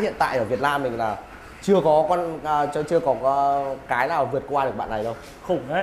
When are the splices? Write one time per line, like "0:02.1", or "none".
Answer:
none